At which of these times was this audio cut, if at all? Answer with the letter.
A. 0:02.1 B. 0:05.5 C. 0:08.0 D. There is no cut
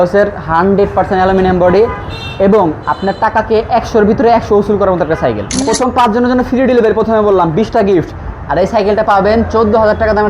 B